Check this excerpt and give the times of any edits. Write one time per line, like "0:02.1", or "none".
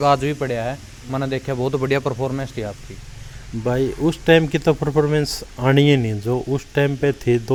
none